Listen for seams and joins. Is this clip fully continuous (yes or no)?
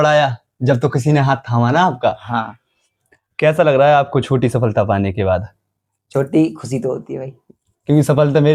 yes